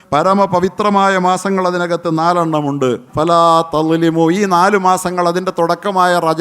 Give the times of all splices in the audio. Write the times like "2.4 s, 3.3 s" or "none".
3.1 s